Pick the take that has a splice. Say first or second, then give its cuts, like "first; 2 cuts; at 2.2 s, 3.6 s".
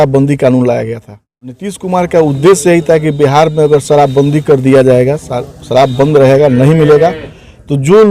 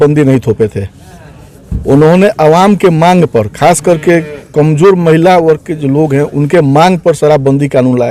first; 1 cut; at 1.7 s